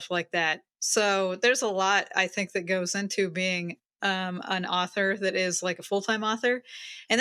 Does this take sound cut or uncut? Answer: uncut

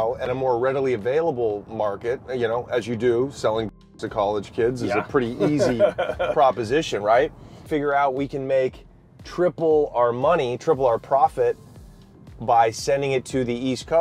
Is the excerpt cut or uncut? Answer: cut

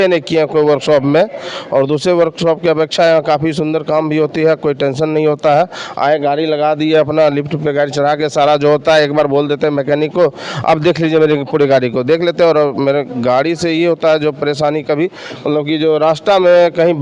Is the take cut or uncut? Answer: uncut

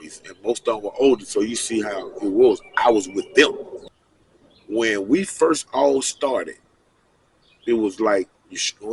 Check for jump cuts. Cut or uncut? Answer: cut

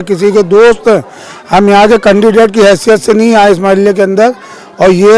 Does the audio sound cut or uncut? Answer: uncut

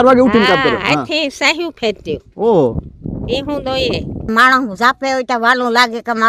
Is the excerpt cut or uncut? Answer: cut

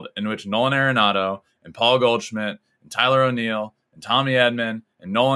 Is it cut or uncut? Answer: uncut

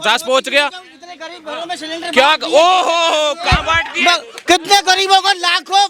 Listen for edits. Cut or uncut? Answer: uncut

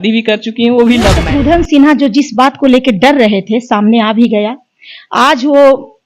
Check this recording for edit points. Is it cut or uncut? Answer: cut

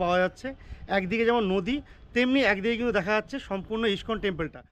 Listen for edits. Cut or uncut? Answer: uncut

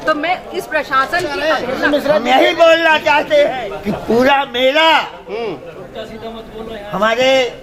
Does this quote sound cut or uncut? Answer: cut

